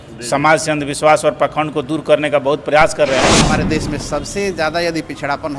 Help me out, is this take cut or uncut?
cut